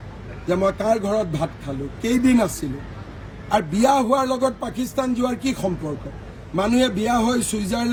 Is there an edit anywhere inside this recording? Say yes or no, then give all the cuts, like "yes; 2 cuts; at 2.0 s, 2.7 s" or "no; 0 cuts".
no; 0 cuts